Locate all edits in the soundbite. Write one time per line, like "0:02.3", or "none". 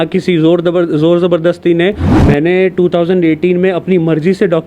0:02.1